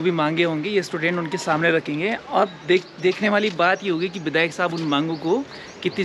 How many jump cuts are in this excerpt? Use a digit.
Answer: 0